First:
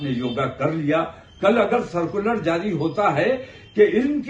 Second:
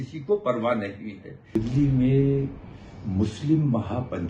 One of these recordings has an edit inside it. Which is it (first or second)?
second